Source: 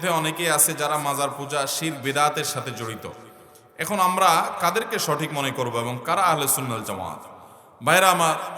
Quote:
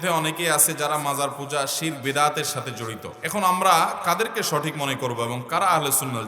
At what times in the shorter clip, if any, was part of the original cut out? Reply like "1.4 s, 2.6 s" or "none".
3.1 s